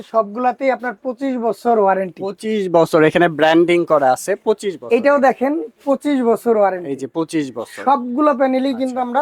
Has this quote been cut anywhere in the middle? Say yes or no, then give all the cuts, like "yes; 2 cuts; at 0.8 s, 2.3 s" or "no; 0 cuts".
no; 0 cuts